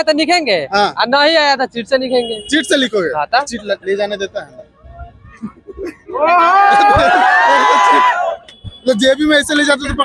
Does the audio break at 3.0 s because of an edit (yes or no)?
no